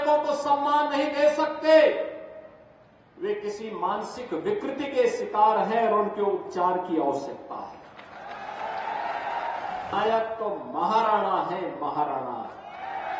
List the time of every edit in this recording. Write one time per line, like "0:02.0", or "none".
0:09.9